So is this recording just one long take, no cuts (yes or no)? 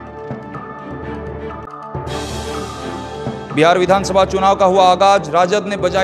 no